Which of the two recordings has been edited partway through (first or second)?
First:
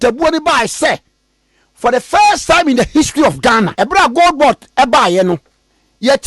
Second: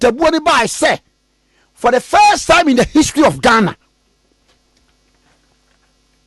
first